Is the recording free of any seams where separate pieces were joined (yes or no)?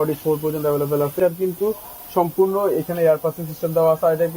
no